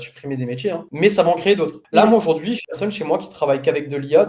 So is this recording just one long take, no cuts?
yes; 0 cuts

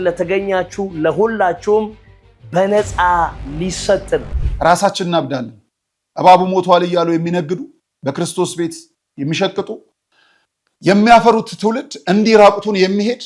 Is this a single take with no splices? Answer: no; 1 cut; at 4.3 s

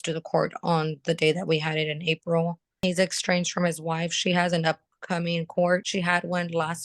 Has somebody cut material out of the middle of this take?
yes; 2 cuts; at 2.8 s, 5.9 s

